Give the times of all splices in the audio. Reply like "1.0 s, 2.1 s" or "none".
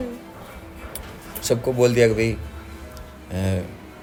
none